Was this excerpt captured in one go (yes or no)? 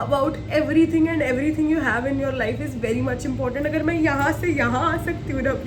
yes